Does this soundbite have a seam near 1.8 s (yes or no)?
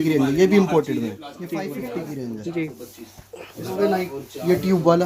yes